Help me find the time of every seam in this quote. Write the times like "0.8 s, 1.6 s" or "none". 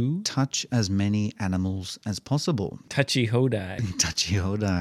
2.8 s